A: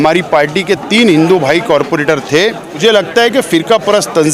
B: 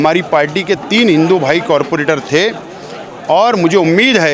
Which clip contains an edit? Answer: A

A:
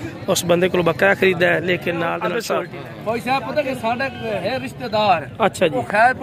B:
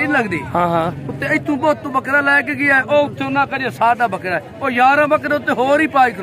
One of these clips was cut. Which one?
A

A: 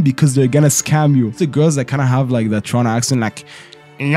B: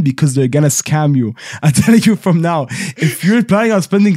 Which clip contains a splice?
A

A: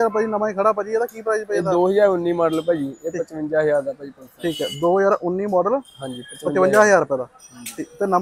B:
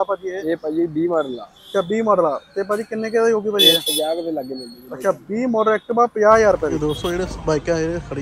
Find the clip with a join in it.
B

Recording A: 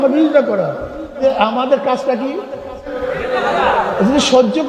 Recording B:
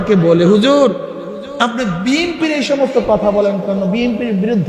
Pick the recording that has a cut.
A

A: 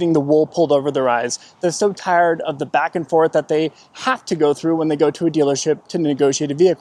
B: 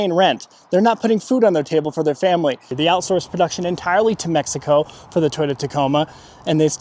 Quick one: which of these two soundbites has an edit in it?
B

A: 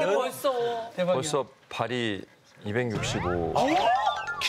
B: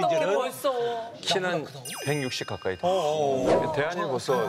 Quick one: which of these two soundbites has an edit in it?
B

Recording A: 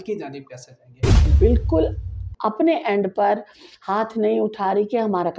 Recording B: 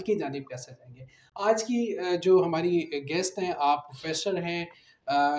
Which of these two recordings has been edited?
A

